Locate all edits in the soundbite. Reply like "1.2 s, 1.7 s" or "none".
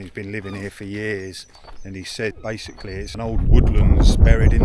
3.1 s